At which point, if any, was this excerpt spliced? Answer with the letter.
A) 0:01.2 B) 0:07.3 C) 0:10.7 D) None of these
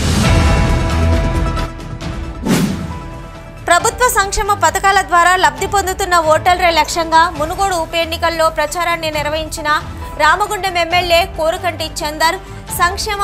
A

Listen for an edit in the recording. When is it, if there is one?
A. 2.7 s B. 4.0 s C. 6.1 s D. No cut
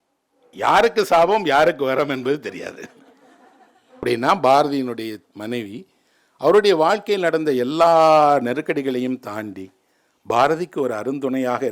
B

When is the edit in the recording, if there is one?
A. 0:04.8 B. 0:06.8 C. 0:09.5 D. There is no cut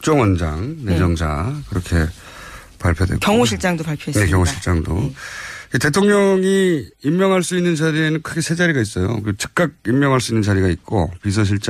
A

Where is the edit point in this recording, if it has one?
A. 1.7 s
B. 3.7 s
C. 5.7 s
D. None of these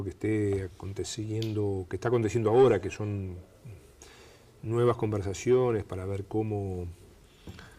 C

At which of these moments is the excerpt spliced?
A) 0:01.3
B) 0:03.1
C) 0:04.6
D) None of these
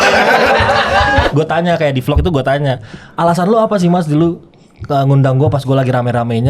A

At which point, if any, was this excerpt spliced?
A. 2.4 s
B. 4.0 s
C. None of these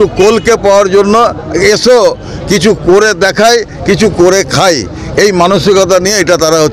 C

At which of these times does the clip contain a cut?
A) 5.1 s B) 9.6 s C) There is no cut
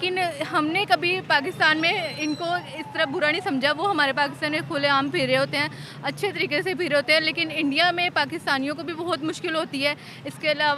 C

